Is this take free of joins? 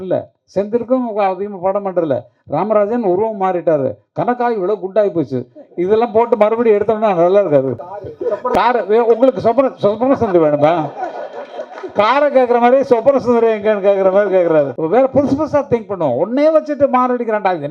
no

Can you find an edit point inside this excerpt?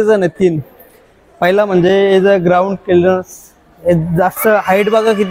no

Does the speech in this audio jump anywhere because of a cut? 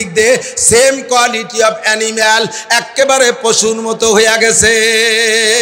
no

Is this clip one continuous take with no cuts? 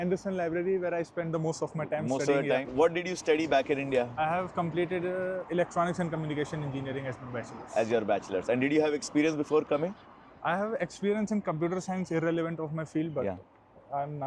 yes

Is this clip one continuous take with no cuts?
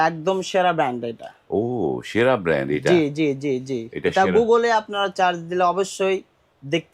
yes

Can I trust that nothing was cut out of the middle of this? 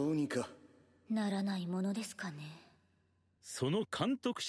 yes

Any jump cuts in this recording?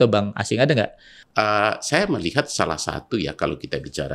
yes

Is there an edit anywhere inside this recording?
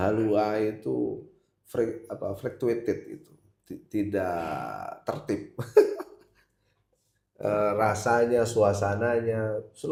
no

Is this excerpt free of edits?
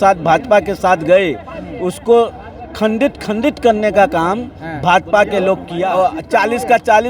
no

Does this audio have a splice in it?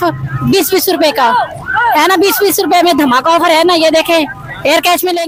no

